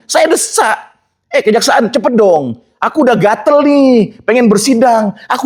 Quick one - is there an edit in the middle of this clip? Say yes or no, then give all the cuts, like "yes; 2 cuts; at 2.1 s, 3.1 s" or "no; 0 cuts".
no; 0 cuts